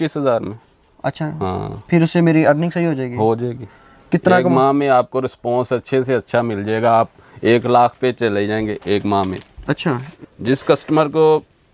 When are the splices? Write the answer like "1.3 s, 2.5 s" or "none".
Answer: 9.8 s